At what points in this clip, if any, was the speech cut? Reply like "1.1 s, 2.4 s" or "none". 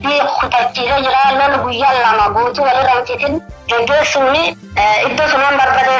4.6 s